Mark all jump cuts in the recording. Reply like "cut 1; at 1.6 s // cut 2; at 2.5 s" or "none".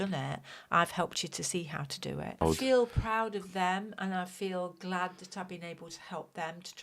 cut 1; at 2.4 s